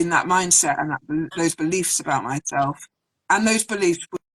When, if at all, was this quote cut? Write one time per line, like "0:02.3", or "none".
none